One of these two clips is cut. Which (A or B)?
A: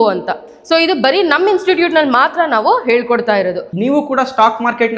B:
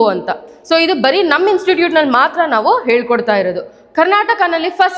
A